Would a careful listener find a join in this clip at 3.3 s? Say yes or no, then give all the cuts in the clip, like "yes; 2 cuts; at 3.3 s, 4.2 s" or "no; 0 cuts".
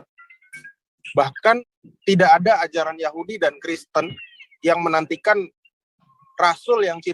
no; 1 cut; at 1.6 s